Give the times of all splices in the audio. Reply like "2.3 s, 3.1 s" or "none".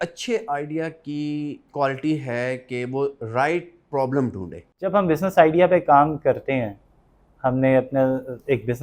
1.6 s, 4.8 s